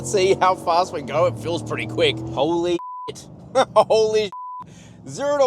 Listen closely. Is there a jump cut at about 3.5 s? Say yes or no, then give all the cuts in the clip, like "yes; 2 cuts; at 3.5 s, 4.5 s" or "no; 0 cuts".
no; 1 cut; at 2.3 s